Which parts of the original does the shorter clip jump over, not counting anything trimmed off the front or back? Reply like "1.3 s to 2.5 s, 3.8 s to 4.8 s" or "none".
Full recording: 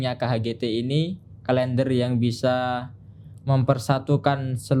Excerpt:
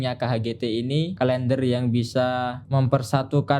1.1 s to 1.4 s, 2.9 s to 3.4 s